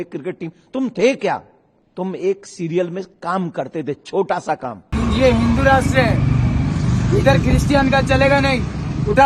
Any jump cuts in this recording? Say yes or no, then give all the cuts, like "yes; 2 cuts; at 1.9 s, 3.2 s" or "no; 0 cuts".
yes; 1 cut; at 4.9 s